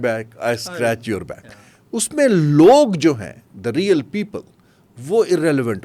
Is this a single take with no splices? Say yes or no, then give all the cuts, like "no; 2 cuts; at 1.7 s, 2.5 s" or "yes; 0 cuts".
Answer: yes; 0 cuts